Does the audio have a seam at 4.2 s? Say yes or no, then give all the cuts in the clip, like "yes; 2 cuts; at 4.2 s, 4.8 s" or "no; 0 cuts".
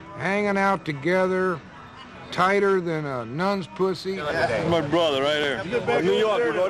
yes; 1 cut; at 4.2 s